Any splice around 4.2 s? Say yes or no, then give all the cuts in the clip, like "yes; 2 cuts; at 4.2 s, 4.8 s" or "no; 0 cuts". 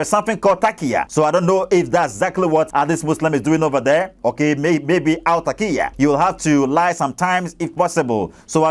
no; 3 cuts; at 1.1 s, 2.7 s, 5.9 s